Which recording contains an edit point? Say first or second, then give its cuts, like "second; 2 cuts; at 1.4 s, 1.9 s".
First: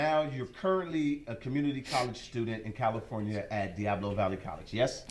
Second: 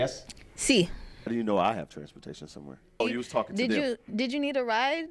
second; 2 cuts; at 1.3 s, 3.0 s